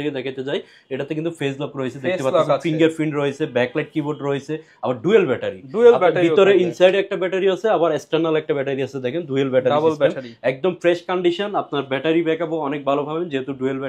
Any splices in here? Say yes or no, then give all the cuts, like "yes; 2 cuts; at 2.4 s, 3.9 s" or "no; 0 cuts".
no; 0 cuts